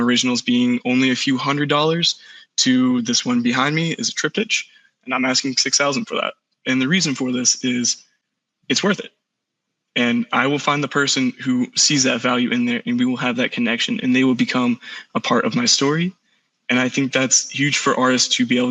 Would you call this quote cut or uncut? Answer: uncut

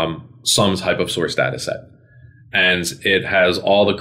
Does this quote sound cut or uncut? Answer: uncut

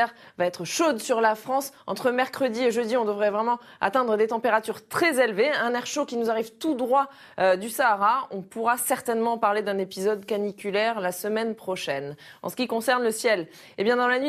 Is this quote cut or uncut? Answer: uncut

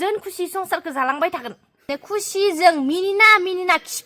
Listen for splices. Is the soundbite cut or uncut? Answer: cut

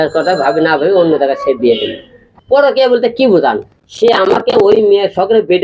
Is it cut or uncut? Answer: cut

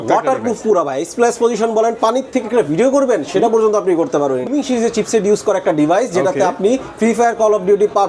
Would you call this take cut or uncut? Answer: cut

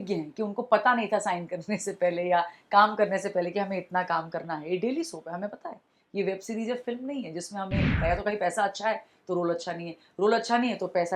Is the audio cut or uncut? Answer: cut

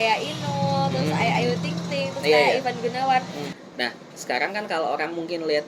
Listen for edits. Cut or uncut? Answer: cut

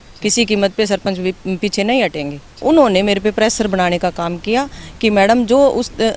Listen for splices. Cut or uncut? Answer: cut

